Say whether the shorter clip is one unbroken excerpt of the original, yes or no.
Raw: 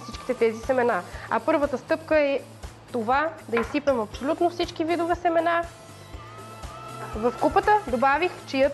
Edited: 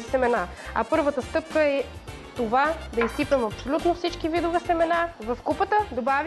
no